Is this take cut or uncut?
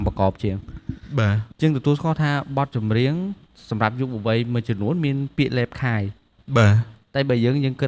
cut